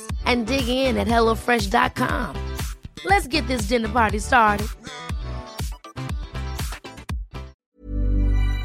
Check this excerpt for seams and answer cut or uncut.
cut